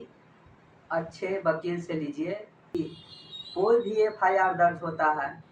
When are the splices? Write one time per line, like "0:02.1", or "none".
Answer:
0:02.7

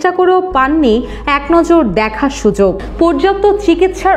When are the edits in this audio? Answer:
0:02.9

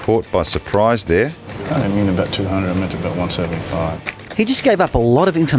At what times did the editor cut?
0:01.5
0:04.2

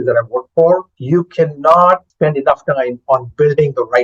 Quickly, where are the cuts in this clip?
0:00.9
0:02.1

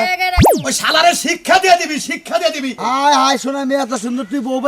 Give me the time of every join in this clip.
0:02.8

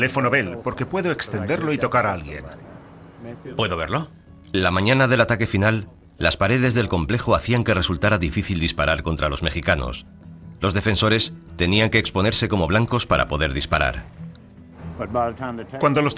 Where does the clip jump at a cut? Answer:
0:06.5

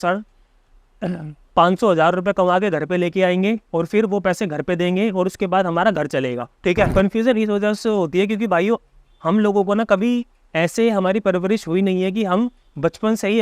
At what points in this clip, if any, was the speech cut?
0:06.9

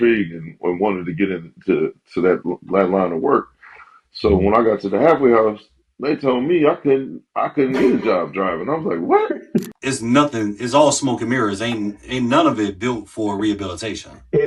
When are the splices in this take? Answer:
0:09.4

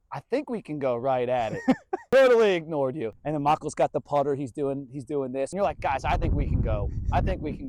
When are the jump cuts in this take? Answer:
0:01.6
0:03.1
0:05.5

